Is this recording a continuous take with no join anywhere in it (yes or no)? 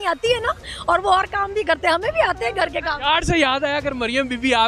yes